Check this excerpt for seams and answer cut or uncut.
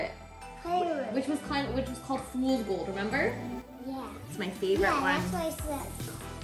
uncut